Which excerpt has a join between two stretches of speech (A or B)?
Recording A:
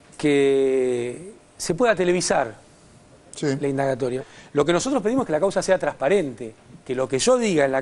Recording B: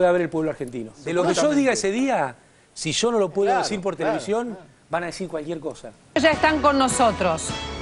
B